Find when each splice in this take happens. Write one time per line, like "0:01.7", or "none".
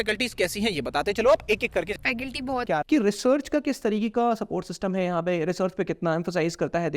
0:02.7

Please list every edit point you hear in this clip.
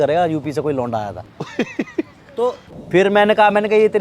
0:02.7

